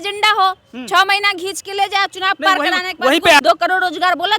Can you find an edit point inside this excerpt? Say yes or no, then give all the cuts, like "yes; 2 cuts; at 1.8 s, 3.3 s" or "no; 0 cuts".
yes; 1 cut; at 3.4 s